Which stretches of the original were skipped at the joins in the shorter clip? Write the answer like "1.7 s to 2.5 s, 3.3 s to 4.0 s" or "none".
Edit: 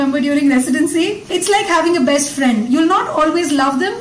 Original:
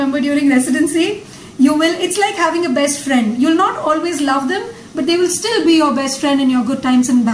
1.3 s to 2.0 s

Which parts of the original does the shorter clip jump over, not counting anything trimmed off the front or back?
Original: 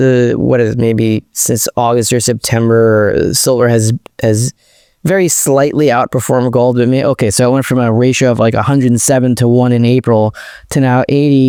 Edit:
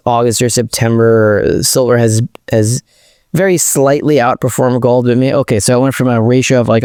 none

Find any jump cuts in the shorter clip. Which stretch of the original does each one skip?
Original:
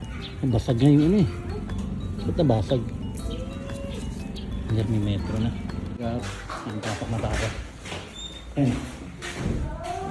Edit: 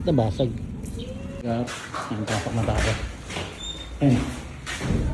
3.7 s to 6.0 s

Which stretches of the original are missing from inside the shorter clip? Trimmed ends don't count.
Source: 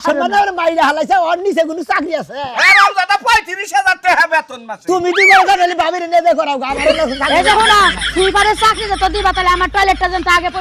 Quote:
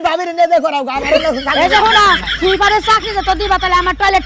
none

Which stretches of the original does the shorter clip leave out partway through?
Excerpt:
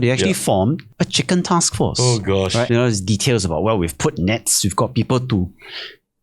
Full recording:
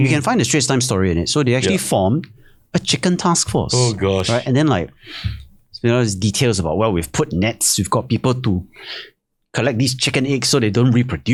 2.3 s to 2.6 s, 4.4 s to 5.8 s

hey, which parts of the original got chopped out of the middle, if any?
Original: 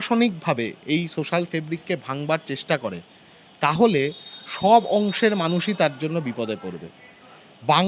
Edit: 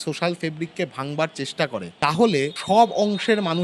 3.0 s to 3.5 s, 4.2 s to 4.5 s

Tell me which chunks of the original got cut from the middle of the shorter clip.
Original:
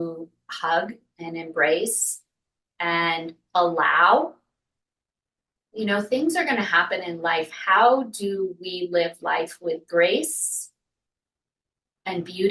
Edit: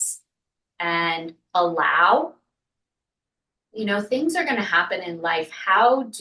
none

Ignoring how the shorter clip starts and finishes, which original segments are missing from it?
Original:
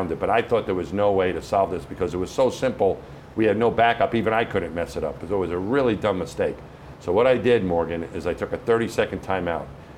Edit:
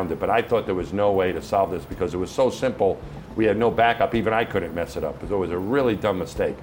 none

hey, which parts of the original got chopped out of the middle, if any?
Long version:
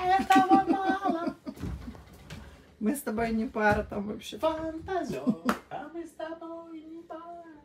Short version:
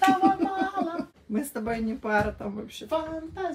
1.4 s to 2.7 s

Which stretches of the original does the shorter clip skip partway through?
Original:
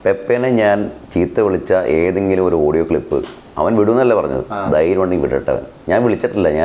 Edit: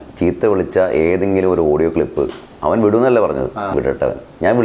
4.7 s to 5.2 s

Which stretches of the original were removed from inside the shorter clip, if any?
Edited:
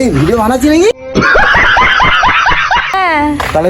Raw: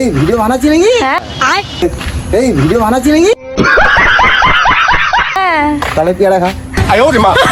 0.9 s to 3.3 s

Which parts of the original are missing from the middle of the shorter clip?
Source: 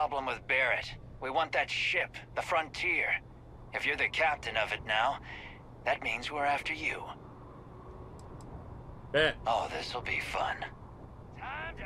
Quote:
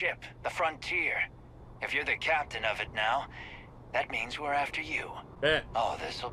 7.1 s to 8.9 s

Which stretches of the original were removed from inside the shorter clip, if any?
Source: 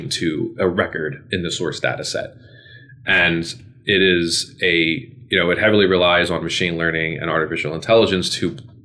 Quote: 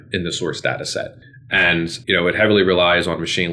3.0 s to 5.1 s

